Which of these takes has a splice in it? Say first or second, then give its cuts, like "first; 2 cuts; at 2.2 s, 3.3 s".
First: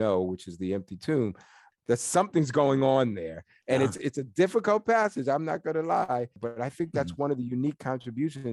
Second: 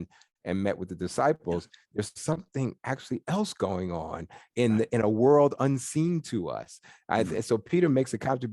first; 2 cuts; at 1.6 s, 6.4 s